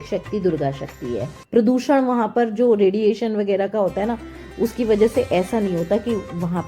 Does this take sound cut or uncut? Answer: cut